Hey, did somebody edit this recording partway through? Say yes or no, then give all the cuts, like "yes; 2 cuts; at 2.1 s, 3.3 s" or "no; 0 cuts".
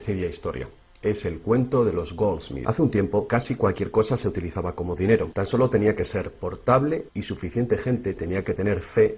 no; 0 cuts